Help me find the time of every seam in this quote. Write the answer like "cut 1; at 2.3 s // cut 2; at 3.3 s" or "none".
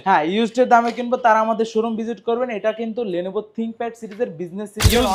none